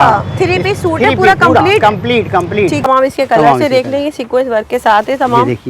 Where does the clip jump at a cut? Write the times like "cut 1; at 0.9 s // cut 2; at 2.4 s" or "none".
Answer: cut 1; at 2.9 s